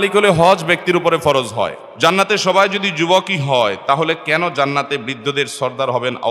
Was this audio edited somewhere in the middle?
yes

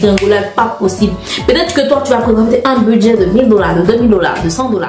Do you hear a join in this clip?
no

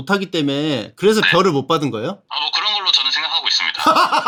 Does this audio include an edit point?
no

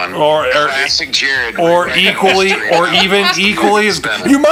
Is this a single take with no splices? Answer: yes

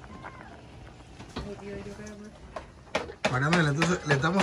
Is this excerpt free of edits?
yes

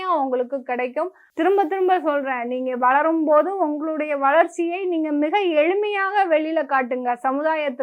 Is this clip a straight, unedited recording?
no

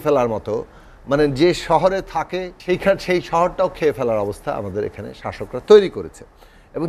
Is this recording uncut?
no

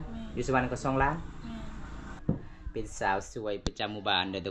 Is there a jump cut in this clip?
yes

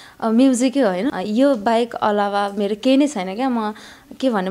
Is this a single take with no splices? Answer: no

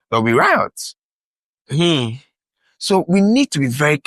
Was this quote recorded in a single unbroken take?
yes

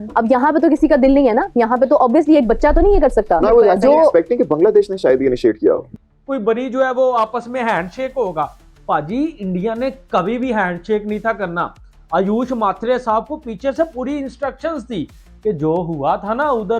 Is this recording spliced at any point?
yes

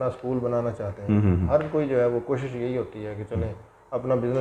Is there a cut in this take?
no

